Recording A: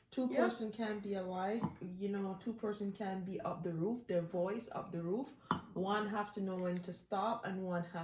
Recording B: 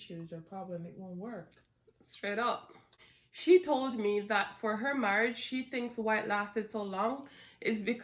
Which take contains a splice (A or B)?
B